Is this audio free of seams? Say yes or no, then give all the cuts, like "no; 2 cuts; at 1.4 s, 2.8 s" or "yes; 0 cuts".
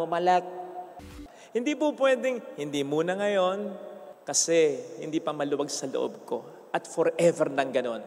no; 1 cut; at 1.0 s